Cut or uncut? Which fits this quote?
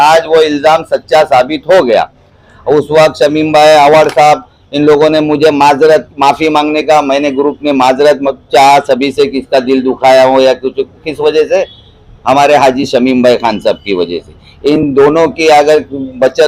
uncut